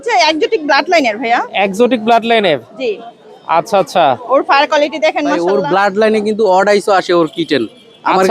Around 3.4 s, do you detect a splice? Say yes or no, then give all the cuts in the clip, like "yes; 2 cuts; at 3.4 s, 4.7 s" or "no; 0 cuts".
no; 1 cut; at 5.4 s